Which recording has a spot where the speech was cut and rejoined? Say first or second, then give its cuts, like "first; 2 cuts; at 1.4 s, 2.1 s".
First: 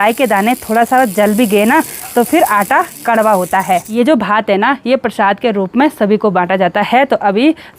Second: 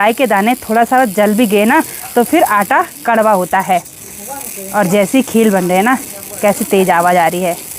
first; 1 cut; at 3.9 s